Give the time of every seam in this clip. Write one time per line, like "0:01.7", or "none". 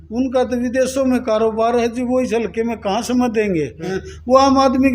0:04.0